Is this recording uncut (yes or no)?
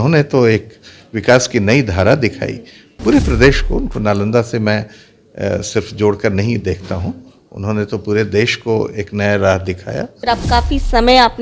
no